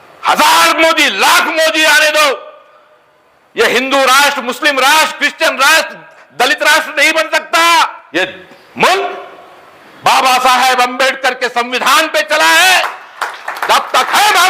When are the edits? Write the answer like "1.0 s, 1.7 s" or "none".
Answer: 8.0 s